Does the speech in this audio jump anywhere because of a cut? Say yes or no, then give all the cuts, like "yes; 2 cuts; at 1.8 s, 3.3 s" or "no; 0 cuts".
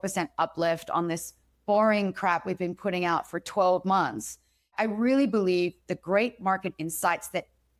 no; 0 cuts